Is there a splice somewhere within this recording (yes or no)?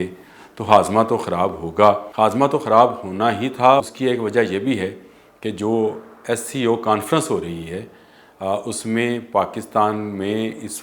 yes